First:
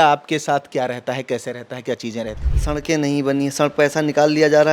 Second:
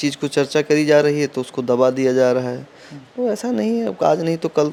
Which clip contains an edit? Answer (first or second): first